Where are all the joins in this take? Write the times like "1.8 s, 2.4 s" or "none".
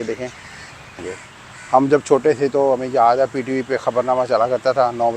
1.2 s